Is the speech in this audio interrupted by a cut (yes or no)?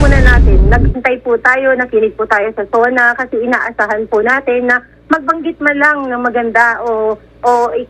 no